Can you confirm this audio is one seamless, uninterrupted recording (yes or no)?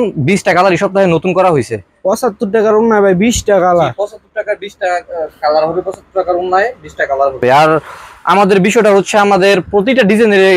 yes